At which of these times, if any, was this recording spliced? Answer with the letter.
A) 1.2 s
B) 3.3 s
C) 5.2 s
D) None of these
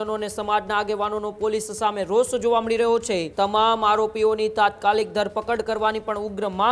B